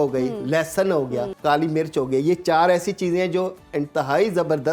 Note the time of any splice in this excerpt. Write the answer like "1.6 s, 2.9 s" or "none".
1.3 s